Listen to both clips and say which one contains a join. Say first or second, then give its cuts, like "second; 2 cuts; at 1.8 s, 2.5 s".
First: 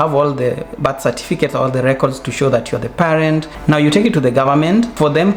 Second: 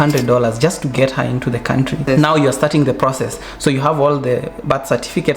second; 1 cut; at 1.8 s